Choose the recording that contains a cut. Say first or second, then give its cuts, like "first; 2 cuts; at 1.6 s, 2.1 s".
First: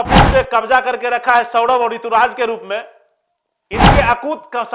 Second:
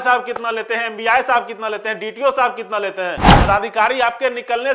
second; 1 cut; at 3.3 s